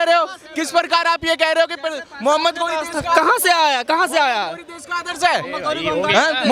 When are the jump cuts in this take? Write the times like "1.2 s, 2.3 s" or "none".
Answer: none